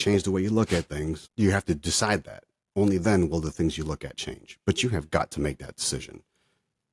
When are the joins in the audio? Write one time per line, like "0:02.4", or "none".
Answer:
0:01.2